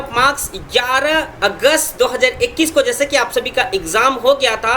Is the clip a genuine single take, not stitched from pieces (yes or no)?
no